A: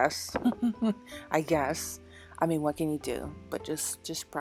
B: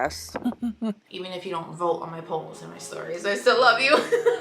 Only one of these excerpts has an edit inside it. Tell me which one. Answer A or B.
B